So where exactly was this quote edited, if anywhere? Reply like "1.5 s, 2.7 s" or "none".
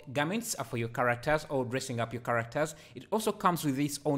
none